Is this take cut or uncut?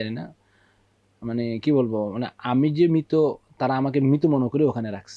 uncut